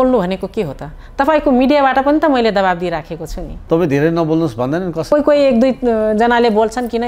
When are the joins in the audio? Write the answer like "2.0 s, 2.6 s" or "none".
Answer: 3.6 s, 5.1 s